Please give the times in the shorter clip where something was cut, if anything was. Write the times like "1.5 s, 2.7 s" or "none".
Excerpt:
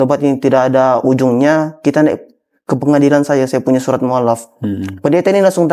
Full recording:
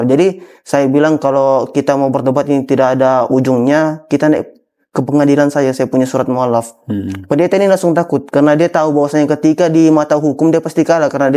none